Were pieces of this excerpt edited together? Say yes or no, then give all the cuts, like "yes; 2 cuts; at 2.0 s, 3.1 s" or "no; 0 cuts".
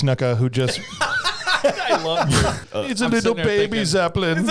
yes; 1 cut; at 2.6 s